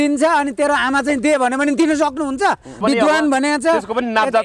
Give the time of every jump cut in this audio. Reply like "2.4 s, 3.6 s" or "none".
2.8 s